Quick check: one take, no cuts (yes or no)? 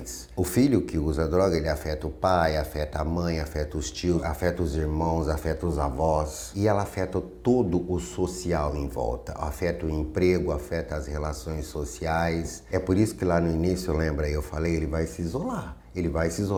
yes